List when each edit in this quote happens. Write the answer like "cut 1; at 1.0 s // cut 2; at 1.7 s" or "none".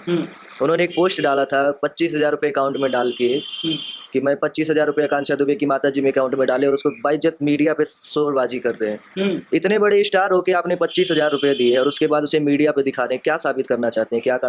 none